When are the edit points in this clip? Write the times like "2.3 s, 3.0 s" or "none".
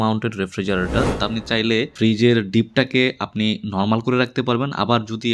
1.1 s